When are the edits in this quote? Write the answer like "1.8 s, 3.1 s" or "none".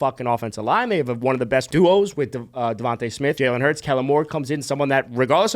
1.7 s, 3.4 s